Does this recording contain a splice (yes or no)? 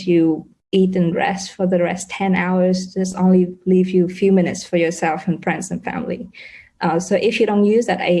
no